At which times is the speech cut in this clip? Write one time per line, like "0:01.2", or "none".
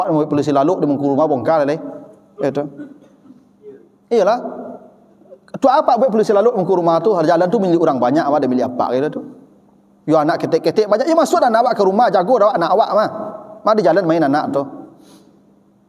none